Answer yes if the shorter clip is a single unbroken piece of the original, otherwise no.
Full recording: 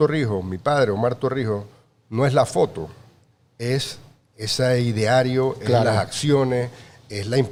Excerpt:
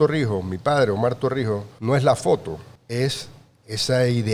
no